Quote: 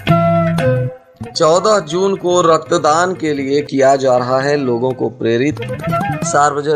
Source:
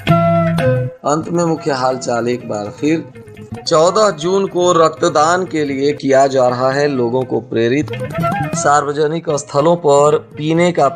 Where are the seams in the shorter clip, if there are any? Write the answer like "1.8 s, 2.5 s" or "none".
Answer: 0.9 s